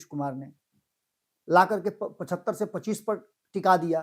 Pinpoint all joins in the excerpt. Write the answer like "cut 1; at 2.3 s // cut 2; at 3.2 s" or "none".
none